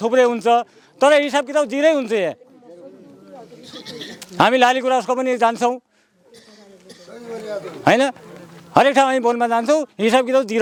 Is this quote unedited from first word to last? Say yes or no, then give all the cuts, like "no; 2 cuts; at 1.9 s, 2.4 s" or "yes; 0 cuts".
yes; 0 cuts